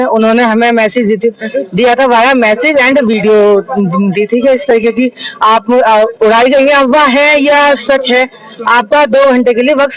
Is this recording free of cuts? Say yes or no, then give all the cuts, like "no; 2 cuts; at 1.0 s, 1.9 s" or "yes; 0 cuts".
yes; 0 cuts